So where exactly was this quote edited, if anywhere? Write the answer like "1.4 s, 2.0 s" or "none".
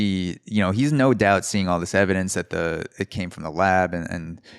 none